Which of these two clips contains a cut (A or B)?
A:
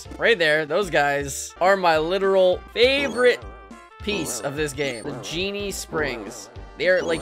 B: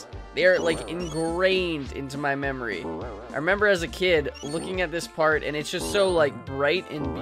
A